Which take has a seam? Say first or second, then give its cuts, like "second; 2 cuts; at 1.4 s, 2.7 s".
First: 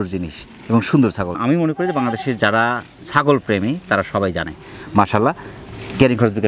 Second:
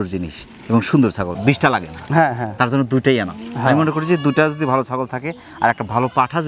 second; 1 cut; at 1.3 s